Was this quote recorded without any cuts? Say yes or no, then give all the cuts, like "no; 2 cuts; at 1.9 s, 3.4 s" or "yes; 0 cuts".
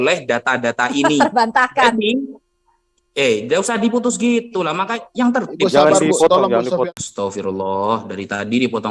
no; 1 cut; at 6.9 s